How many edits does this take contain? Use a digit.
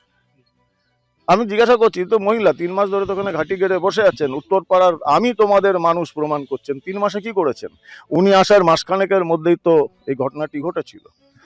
0